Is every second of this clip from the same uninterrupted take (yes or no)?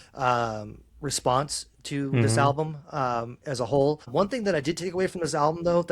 no